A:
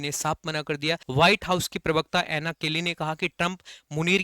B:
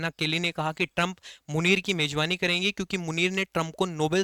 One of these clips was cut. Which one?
A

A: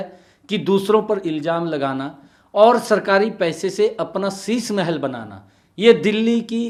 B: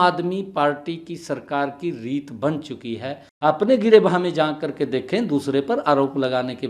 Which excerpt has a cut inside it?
B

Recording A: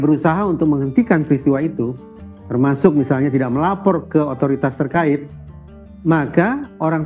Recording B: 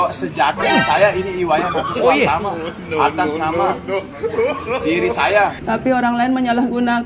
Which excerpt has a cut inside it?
B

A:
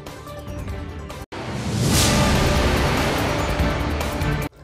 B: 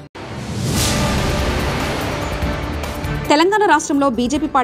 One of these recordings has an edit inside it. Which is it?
A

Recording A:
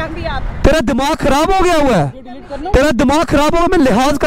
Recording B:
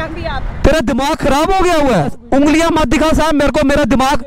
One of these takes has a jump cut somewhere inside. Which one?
B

